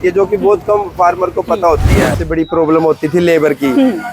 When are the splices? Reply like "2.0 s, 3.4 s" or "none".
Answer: 1.9 s